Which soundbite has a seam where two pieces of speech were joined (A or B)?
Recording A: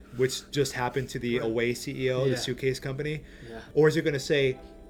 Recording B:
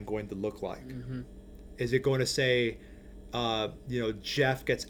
A